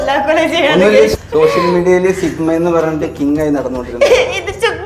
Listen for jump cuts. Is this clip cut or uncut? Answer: cut